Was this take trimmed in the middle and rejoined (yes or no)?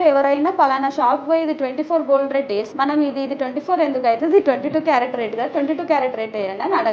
yes